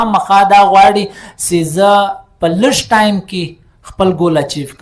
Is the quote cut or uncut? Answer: uncut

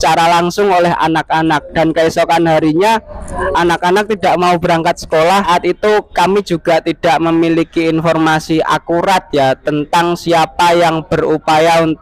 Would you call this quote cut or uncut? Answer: cut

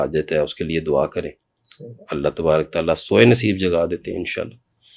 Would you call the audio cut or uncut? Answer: uncut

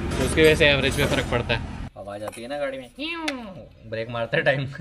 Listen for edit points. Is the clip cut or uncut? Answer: cut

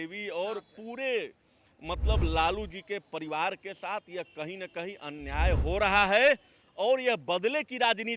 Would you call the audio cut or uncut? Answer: uncut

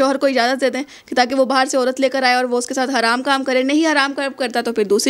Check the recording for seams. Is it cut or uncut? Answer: uncut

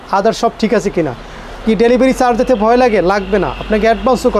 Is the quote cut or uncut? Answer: uncut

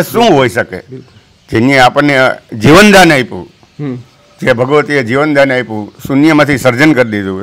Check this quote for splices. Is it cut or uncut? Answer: uncut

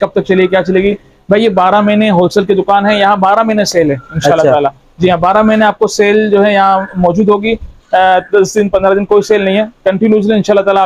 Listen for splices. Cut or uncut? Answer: uncut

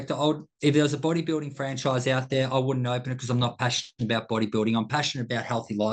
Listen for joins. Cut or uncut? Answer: uncut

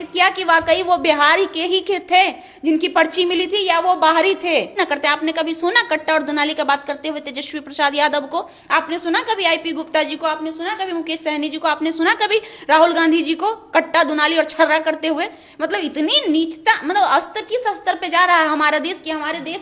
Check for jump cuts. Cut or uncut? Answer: cut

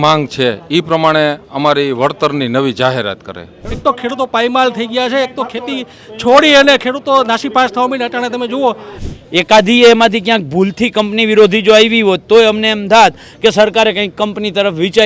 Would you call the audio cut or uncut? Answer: cut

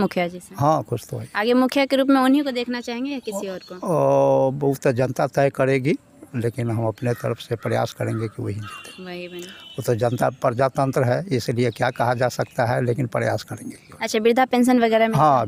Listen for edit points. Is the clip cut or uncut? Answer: uncut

